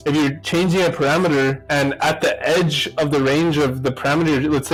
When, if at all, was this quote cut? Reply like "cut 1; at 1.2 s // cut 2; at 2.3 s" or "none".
none